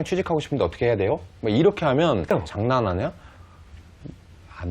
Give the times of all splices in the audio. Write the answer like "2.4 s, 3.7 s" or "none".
2.3 s